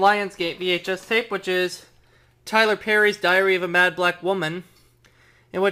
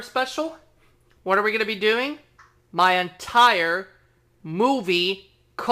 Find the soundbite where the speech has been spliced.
second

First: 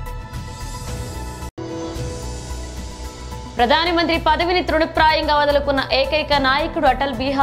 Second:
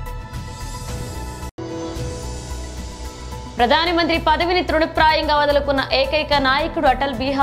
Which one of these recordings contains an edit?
second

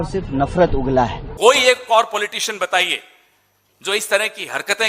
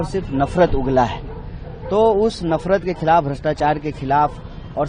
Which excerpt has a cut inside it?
first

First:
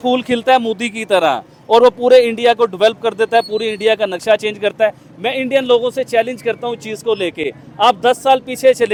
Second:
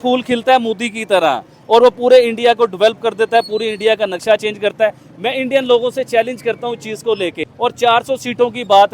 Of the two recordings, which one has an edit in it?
second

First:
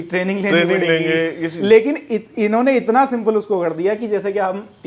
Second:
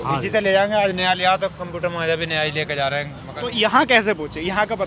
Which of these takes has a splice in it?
second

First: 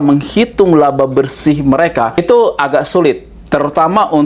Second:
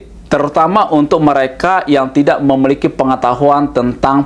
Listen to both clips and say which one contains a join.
first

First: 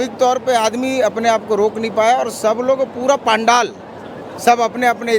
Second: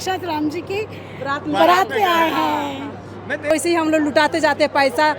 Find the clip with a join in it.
second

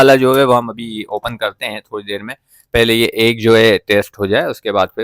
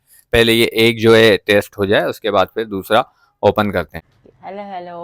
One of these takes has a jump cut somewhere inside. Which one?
second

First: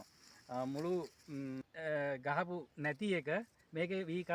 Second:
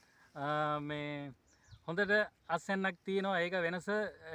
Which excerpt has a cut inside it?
first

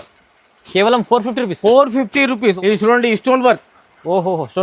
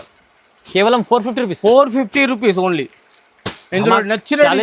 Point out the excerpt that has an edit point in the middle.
first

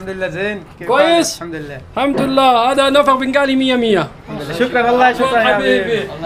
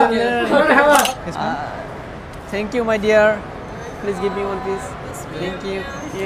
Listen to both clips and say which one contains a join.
second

